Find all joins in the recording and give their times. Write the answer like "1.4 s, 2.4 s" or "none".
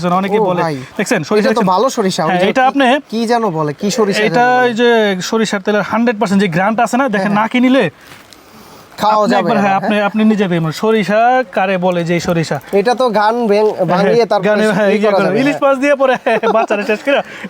none